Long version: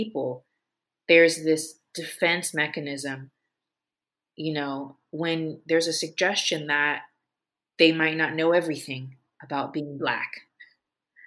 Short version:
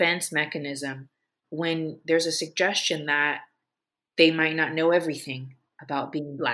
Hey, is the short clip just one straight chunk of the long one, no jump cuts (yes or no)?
no